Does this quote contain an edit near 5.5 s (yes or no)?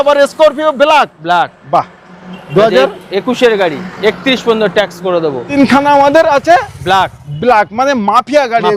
yes